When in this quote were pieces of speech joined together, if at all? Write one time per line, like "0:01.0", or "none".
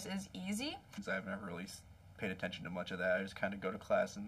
0:01.0

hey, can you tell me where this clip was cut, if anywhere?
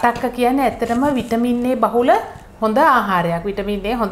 none

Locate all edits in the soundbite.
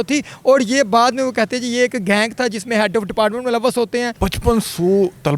0:04.1

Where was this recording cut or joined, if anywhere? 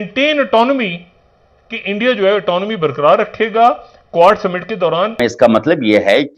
0:05.2

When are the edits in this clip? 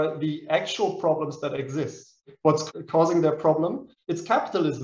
0:02.3
0:03.9

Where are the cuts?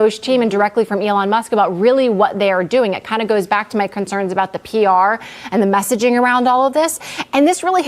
0:03.5

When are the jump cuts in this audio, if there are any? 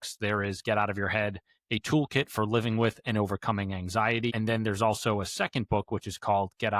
0:04.3

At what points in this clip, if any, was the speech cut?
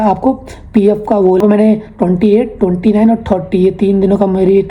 0:01.4

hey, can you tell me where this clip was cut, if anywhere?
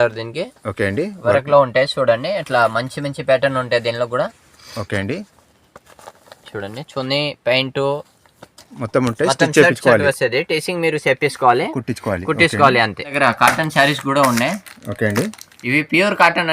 0:13.1

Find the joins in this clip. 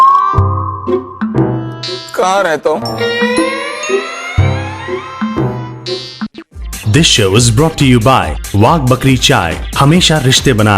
0:06.3

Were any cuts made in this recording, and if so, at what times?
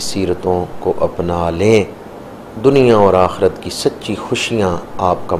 none

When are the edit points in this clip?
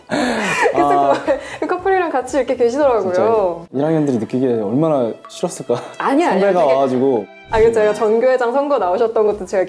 0:07.3

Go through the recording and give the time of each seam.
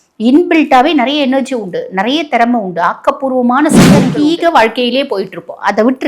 0:04.1

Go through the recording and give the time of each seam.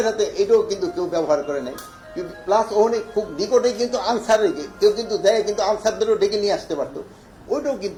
none

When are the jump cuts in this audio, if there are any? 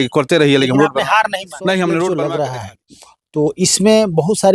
0:02.2

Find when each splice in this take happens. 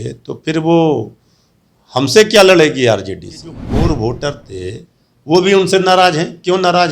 0:03.6

